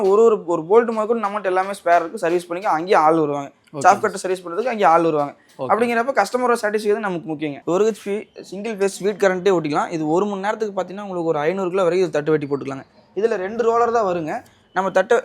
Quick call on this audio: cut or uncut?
cut